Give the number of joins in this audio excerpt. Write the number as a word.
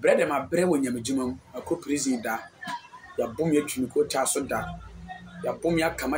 zero